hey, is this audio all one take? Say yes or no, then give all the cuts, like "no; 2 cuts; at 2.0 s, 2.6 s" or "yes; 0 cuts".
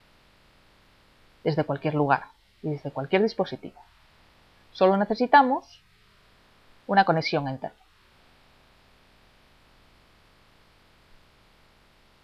yes; 0 cuts